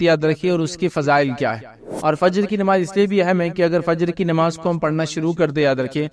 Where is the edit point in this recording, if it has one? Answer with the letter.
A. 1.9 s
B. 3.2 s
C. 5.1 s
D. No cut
A